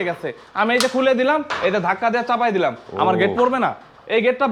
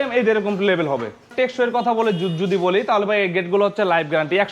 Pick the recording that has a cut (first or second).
second